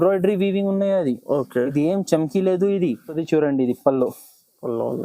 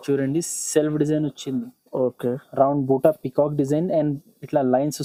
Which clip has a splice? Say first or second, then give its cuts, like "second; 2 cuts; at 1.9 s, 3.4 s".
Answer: first; 1 cut; at 3.2 s